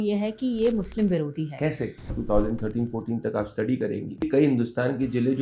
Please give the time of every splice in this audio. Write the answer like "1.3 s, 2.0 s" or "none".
2.2 s, 4.3 s